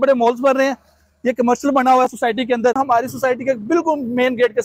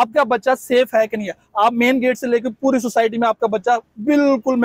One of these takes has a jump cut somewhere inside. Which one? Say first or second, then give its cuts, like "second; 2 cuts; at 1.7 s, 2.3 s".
first; 1 cut; at 2.8 s